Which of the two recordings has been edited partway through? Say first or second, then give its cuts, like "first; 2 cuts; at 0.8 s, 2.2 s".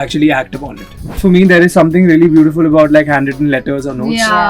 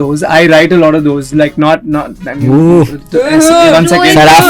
first; 1 cut; at 1.2 s